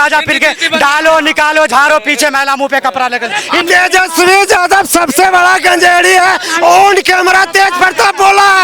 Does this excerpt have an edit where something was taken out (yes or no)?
yes